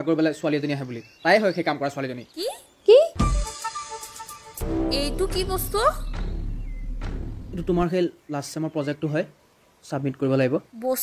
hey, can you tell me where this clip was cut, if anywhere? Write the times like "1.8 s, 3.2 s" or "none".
4.6 s